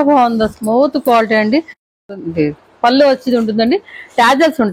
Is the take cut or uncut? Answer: cut